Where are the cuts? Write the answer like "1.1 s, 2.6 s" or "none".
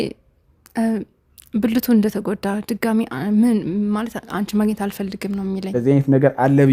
5.7 s